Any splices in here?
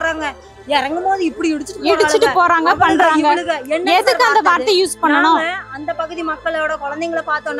no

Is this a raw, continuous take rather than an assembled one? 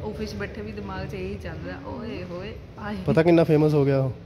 yes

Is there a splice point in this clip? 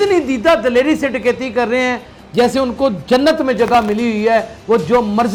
no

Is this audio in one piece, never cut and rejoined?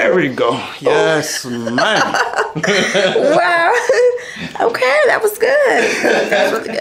yes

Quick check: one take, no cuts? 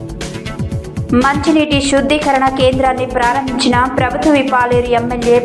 no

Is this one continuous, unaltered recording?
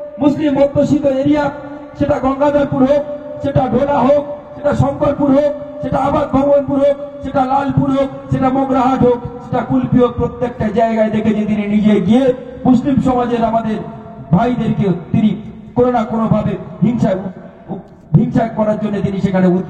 yes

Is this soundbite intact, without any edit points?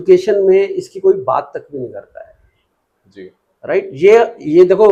yes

